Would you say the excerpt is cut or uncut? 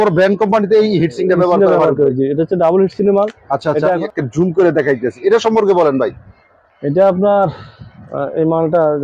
cut